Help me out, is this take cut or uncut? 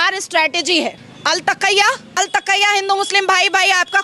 cut